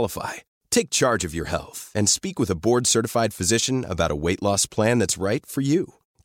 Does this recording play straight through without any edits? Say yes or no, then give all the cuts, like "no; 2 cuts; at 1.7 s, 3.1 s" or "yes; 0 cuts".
yes; 0 cuts